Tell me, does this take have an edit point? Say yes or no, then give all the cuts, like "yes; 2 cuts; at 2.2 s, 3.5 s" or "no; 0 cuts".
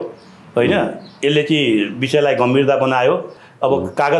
no; 0 cuts